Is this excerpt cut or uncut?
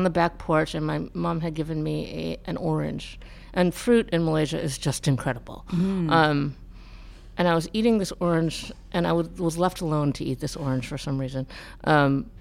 uncut